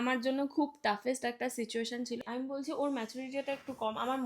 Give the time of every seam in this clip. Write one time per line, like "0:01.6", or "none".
0:02.2